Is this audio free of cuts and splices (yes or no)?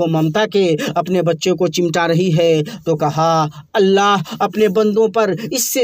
yes